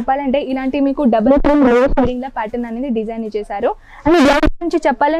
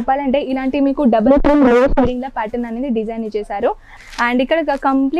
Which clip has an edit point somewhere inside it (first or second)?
second